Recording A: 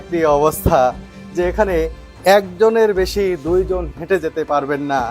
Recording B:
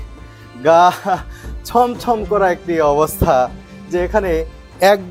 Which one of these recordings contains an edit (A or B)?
A